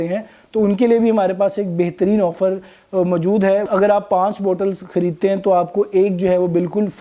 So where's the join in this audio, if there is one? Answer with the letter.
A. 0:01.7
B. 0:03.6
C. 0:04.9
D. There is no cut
B